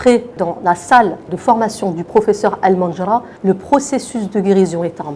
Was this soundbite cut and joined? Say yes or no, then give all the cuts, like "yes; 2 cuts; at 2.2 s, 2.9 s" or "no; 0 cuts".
no; 0 cuts